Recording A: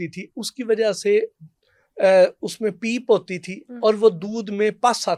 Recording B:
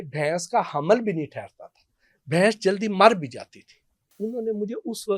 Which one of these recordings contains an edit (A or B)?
B